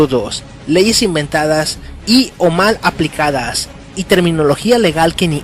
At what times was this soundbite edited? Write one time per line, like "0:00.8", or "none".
0:03.8